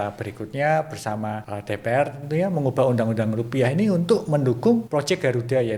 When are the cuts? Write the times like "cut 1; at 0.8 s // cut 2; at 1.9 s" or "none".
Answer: cut 1; at 1.5 s // cut 2; at 4.9 s